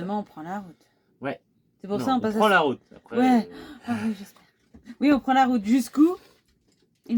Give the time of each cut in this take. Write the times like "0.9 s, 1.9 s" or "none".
none